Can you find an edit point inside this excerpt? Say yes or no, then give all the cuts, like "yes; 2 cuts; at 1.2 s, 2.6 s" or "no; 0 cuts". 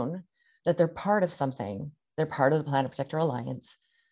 no; 0 cuts